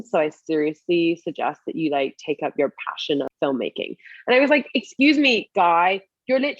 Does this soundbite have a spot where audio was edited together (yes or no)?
yes